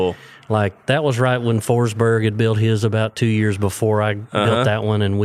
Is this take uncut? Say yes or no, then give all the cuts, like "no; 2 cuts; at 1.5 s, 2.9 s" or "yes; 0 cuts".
yes; 0 cuts